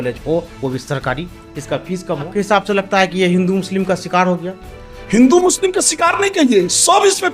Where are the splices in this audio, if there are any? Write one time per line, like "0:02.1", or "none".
0:02.3